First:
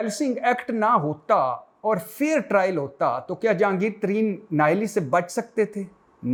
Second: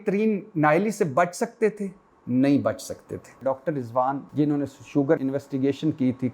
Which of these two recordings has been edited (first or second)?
second